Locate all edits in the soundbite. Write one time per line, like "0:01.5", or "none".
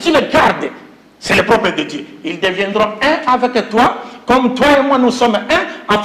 none